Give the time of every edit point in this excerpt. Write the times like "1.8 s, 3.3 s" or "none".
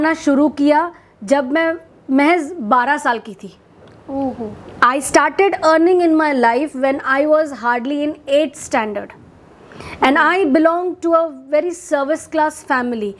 none